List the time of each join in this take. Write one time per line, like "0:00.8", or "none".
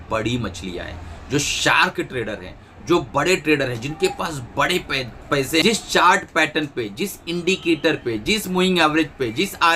0:05.6